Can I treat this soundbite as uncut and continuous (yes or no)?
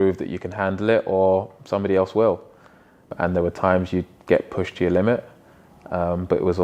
yes